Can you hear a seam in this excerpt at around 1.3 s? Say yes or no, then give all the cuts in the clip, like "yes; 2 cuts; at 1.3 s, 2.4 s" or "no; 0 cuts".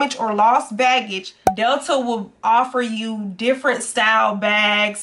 yes; 1 cut; at 1.3 s